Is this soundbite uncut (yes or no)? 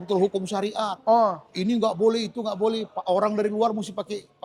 yes